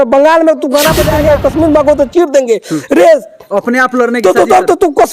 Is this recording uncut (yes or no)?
no